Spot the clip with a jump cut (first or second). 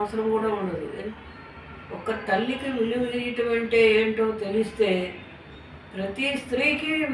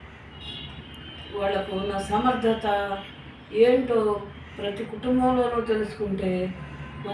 first